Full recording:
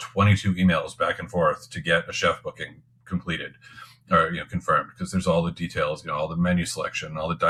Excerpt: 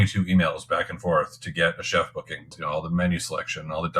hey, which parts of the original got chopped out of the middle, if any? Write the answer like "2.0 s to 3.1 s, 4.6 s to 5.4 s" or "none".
2.9 s to 6.0 s